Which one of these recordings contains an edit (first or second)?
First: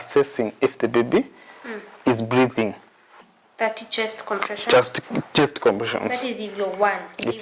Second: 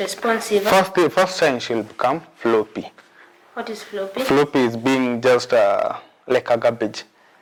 first